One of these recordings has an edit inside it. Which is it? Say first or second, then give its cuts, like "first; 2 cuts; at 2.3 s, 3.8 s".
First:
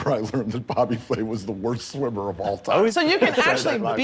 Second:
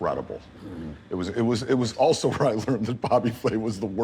first; 1 cut; at 2.9 s